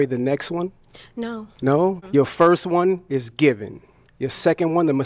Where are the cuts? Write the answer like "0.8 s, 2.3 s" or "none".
2.0 s